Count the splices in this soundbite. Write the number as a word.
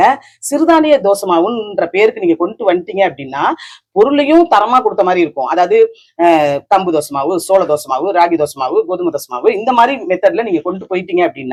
zero